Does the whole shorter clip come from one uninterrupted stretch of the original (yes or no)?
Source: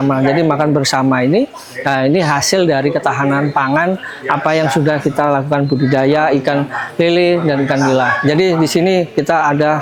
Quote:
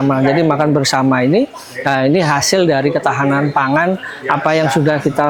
yes